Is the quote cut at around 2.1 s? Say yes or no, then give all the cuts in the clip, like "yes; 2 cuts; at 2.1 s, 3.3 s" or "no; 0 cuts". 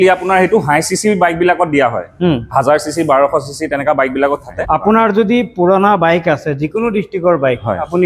no; 1 cut; at 4.5 s